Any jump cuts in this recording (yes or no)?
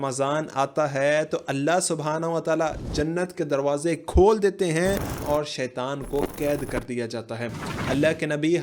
yes